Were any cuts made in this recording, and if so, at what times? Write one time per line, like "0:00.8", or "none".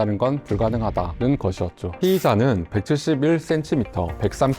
0:01.9